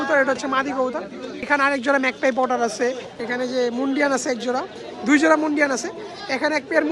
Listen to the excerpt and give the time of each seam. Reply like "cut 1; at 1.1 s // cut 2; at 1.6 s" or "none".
cut 1; at 1.5 s // cut 2; at 3.1 s